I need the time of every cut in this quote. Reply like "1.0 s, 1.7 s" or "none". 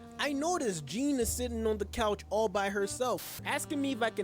3.3 s